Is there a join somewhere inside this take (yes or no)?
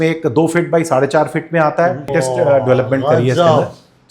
yes